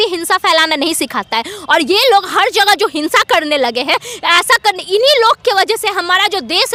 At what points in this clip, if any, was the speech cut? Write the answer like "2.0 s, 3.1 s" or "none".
none